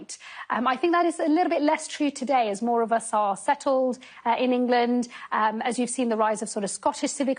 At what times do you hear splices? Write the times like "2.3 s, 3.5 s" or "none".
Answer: 5.2 s